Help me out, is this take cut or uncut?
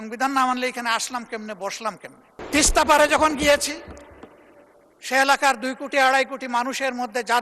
cut